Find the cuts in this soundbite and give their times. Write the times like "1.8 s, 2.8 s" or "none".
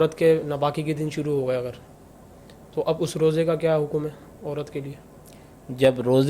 none